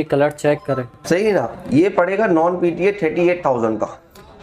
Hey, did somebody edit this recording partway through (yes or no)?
yes